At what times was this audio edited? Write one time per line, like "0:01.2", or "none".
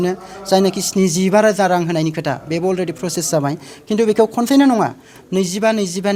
none